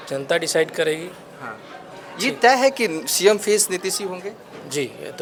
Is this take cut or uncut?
uncut